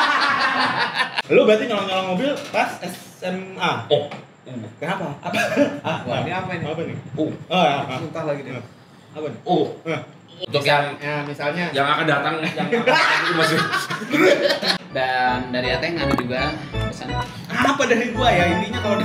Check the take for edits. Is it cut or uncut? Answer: cut